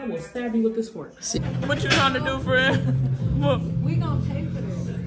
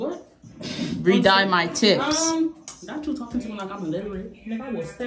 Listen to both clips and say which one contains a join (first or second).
first